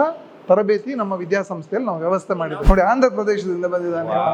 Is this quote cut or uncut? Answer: cut